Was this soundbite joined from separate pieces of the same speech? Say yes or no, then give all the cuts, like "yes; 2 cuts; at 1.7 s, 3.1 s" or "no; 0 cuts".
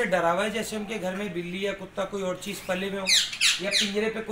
no; 0 cuts